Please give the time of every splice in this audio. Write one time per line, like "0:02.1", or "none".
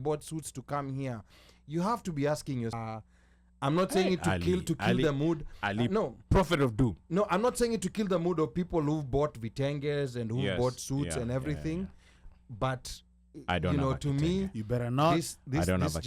0:02.8